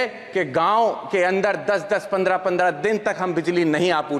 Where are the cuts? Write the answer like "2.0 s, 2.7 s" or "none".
none